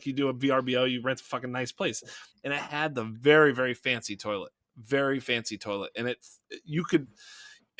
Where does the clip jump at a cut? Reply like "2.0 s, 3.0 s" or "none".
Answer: 2.3 s